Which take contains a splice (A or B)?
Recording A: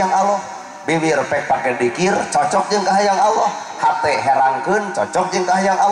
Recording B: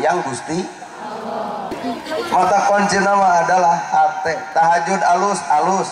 B